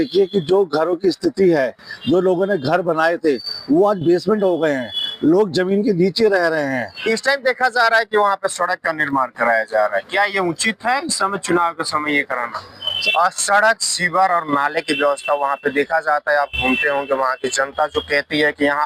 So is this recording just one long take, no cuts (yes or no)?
no